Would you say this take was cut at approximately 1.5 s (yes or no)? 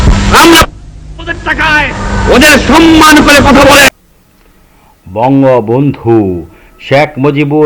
no